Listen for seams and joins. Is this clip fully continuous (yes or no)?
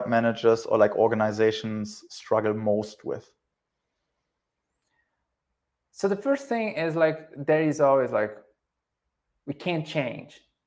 yes